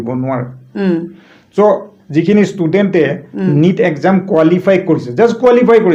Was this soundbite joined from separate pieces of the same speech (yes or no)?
no